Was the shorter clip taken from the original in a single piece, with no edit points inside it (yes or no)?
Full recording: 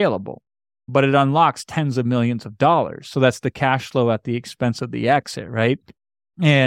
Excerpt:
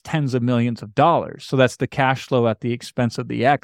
yes